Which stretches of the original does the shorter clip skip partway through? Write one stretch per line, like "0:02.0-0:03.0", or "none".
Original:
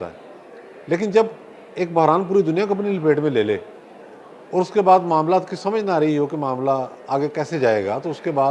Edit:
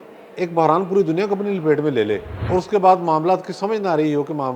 0:03.7-0:04.4